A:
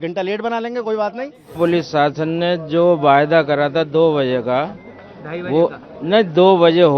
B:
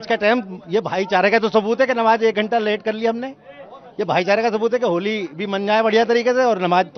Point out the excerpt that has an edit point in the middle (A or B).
A